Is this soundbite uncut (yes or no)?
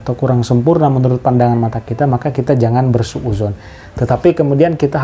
yes